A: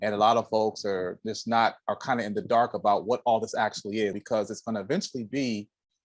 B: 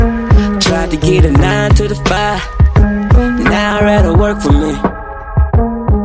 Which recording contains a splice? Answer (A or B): A